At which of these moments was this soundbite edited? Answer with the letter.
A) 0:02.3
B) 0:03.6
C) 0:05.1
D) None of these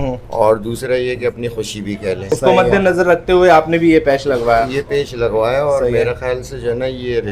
A